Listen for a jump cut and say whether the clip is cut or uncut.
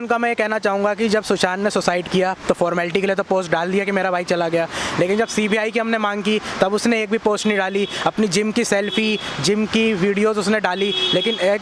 uncut